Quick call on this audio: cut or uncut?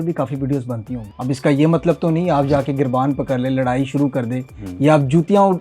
cut